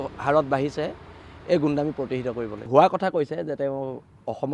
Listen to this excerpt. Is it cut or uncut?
cut